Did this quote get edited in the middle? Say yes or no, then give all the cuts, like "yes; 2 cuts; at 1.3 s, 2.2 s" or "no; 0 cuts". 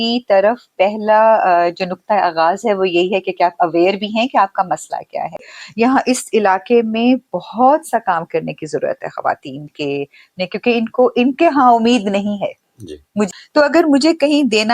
yes; 2 cuts; at 5.6 s, 13.3 s